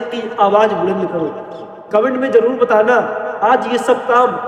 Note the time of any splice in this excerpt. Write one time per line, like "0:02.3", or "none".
none